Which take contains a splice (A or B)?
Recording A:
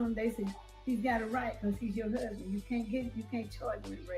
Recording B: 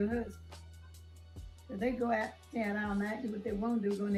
A